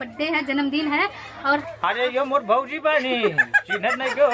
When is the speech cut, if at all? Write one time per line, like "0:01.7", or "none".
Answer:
0:01.6